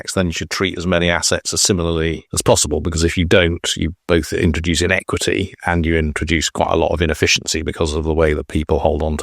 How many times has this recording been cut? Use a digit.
1